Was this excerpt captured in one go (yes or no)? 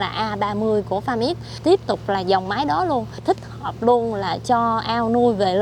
no